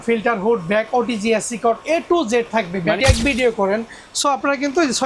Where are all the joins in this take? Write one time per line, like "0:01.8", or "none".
0:03.0